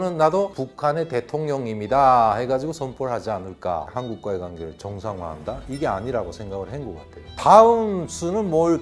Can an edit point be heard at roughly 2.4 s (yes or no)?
no